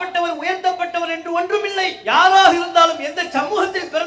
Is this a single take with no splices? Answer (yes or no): yes